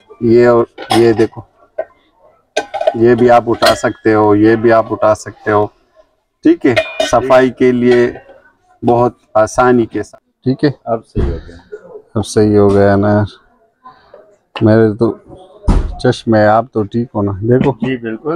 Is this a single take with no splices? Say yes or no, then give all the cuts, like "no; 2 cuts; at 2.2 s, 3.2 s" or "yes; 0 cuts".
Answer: no; 1 cut; at 10.0 s